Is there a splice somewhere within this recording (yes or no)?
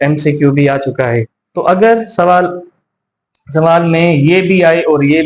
yes